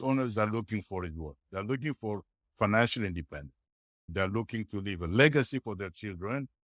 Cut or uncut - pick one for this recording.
uncut